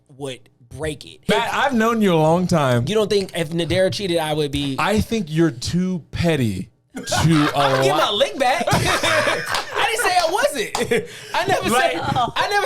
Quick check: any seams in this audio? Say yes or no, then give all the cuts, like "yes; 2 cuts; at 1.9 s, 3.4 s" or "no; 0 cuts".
yes; 1 cut; at 1.2 s